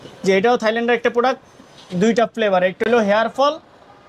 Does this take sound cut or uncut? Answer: uncut